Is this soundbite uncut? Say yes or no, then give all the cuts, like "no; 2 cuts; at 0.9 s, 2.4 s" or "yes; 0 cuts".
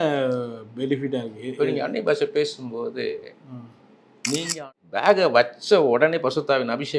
no; 1 cut; at 4.6 s